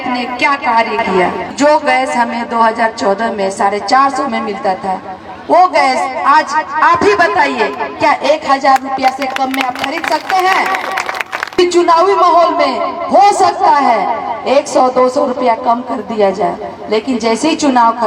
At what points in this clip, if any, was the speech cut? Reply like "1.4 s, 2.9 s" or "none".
1.5 s, 11.5 s